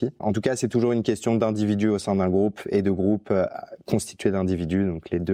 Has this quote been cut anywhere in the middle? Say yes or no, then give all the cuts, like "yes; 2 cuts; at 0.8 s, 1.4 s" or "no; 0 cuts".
no; 0 cuts